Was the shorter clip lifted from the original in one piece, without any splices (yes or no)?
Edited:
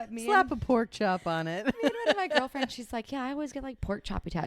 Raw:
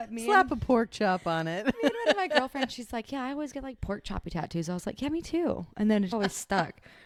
yes